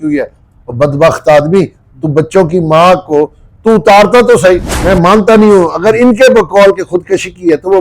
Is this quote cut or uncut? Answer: cut